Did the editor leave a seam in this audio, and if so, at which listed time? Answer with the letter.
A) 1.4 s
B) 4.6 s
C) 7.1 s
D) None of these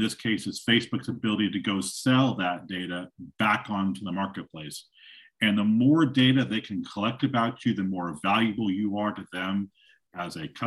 D